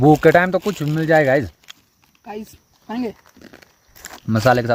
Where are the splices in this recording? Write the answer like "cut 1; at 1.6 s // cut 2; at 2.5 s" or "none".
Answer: none